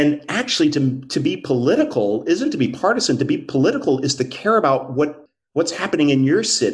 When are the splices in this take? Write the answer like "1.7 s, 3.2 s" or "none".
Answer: 5.2 s